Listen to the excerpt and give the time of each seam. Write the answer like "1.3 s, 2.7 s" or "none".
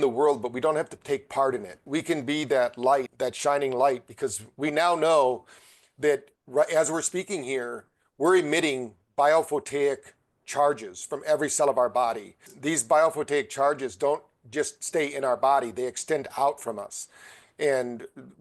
1.8 s, 3.1 s, 12.5 s